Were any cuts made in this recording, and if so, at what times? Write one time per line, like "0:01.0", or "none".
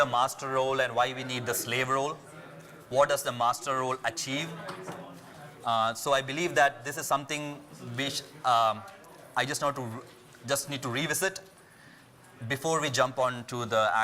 0:08.7

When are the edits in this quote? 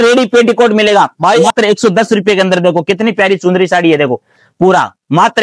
0:01.5

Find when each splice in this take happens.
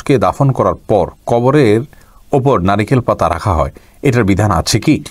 none

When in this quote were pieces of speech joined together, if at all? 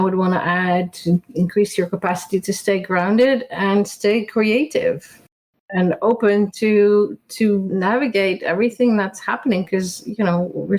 0:05.6
0:07.7

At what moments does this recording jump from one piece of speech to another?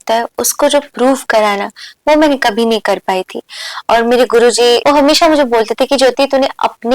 0:04.8

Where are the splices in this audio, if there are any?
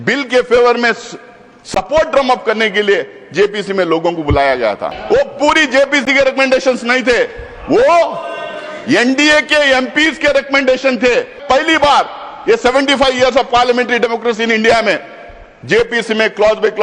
0:04.9
0:11.4

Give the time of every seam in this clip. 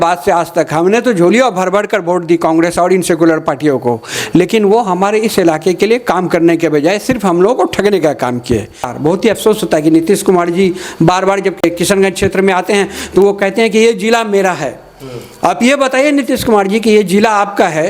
0:08.9
0:11.6

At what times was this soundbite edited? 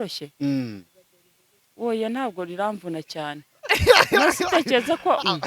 none

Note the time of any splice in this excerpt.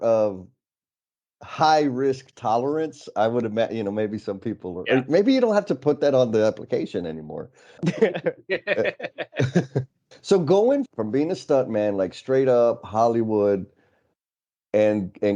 0:07.8
0:10.0
0:10.9

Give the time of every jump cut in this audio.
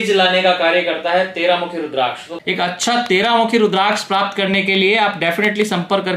0:02.3

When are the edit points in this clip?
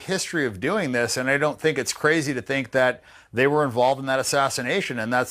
none

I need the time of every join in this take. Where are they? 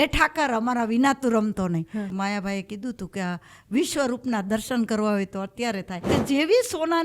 0:02.1
0:06.1

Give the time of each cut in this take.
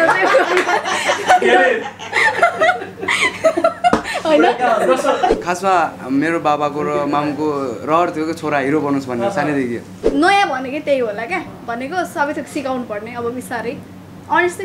0:05.4
0:10.1

